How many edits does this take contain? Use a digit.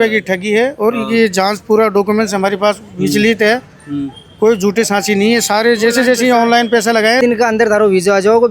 1